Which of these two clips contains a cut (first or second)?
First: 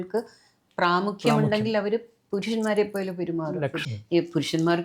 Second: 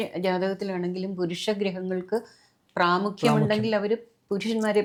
first